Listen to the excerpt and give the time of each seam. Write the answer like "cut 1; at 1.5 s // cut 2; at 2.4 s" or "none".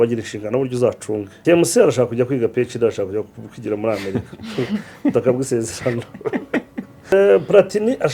cut 1; at 1.3 s // cut 2; at 7.1 s